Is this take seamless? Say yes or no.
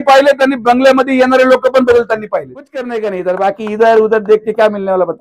no